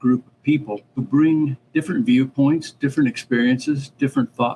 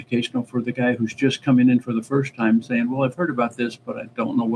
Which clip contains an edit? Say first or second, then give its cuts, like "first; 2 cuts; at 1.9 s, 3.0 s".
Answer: first; 1 cut; at 1.1 s